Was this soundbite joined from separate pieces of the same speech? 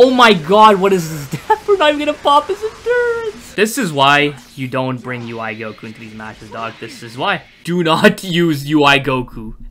yes; 2 cuts; at 3.4 s, 7.5 s

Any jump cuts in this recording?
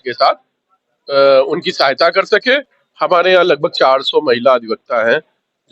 yes; 1 cut; at 2.8 s

